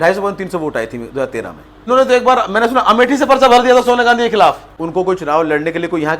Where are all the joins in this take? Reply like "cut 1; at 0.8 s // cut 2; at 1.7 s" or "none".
cut 1; at 1.8 s // cut 2; at 4.7 s